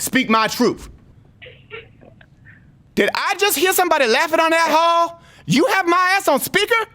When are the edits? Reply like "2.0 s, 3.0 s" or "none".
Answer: 1.1 s, 2.8 s